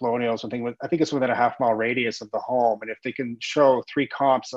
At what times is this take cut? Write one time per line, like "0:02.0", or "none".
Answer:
none